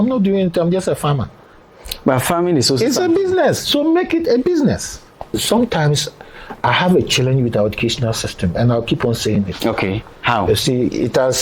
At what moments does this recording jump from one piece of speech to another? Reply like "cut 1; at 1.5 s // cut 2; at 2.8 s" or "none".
cut 1; at 5.4 s